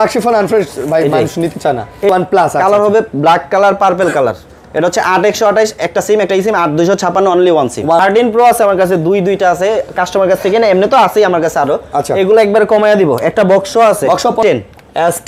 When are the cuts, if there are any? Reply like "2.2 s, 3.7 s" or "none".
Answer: 2.1 s, 8.0 s, 14.4 s